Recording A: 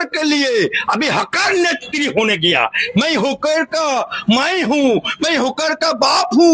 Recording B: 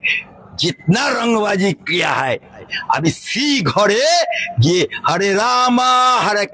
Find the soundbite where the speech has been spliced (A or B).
B